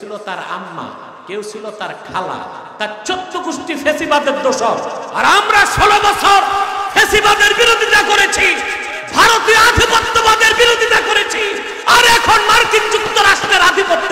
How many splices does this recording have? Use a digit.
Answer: 3